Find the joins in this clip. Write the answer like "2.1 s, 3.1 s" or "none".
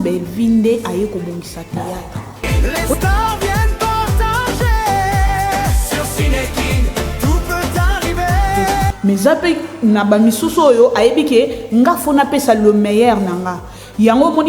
2.5 s, 8.9 s